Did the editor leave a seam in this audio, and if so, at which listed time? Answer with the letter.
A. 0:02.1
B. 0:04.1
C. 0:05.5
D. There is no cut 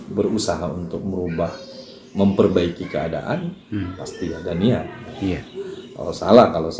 D